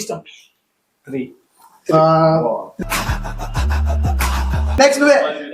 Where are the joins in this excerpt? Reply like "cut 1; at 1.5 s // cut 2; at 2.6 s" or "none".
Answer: cut 1; at 4.6 s